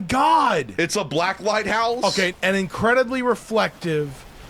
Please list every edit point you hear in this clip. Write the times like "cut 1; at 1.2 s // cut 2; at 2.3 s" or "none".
cut 1; at 2.3 s